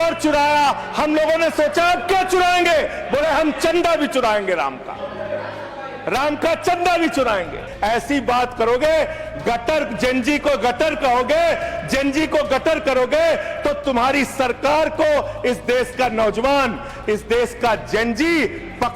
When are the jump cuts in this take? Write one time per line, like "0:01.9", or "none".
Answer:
0:07.7